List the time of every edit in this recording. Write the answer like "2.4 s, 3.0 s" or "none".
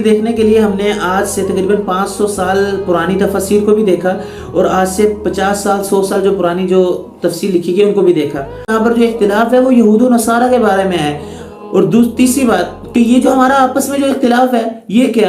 8.7 s